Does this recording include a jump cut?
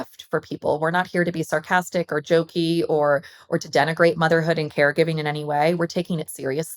no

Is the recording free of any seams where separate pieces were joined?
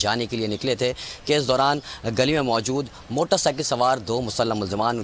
yes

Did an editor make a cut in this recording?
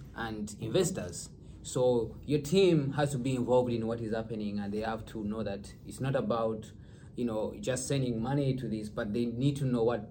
no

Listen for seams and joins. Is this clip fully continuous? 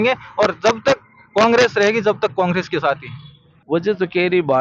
no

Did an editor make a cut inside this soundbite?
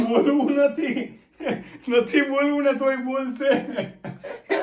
no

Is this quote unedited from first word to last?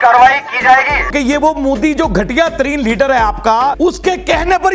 no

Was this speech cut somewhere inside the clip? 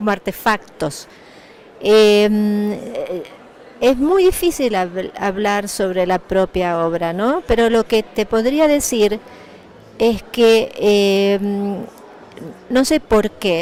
no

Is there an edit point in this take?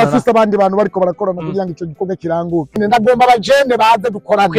yes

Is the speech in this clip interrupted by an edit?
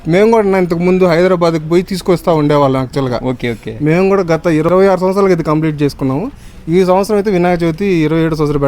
yes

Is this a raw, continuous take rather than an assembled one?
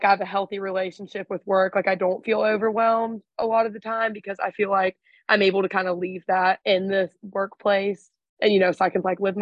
yes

